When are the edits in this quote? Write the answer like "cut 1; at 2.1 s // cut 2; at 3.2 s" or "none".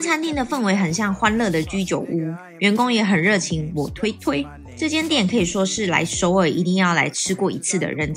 cut 1; at 4.6 s